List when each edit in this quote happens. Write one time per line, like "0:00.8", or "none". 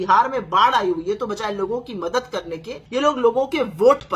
0:02.7